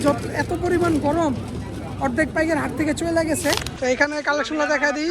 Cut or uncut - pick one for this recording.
cut